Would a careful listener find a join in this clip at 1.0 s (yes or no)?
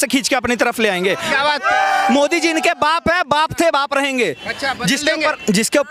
no